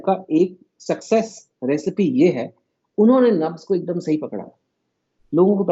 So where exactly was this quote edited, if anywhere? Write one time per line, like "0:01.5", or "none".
none